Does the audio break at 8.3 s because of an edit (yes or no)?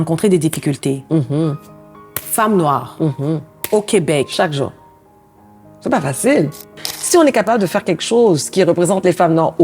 no